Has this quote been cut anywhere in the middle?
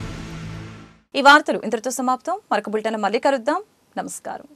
no; 0 cuts

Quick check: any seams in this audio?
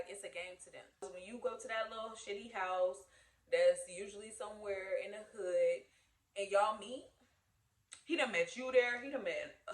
yes; 1 cut; at 1.1 s

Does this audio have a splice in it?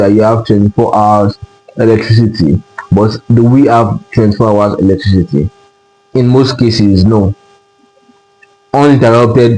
no; 0 cuts

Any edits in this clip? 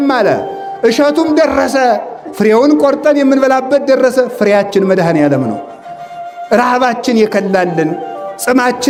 no; 0 cuts

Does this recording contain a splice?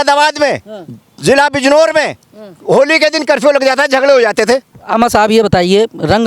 yes; 1 cut; at 4.8 s

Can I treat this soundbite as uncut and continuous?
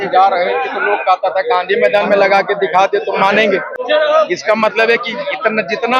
no; 1 cut; at 3.8 s

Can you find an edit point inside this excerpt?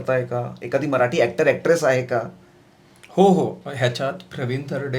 no; 0 cuts

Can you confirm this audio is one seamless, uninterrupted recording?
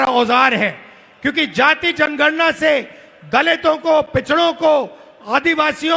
yes; 0 cuts

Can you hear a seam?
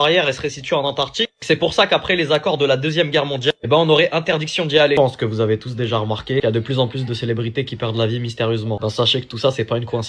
yes; 1 cut; at 5.0 s

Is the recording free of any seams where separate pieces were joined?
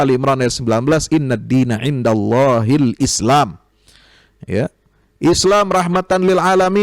yes; 0 cuts

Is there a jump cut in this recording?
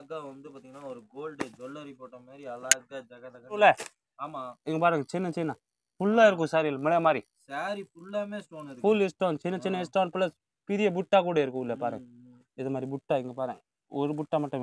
yes; 1 cut; at 3.6 s

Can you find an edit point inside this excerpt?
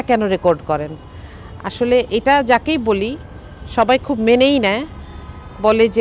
no; 0 cuts

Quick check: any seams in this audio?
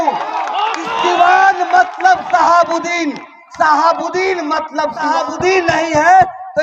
yes; 1 cut; at 5.1 s

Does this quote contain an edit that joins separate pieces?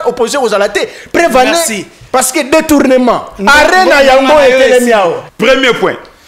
yes; 1 cut; at 5.3 s

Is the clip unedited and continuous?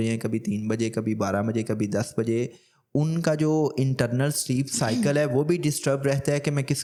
yes; 0 cuts

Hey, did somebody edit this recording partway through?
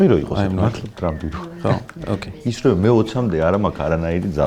no; 0 cuts

